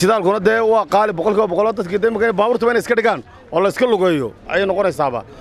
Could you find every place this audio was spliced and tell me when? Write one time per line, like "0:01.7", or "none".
0:04.4